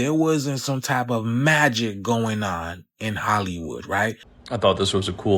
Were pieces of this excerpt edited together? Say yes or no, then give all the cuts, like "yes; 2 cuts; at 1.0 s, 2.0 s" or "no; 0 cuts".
yes; 1 cut; at 4.3 s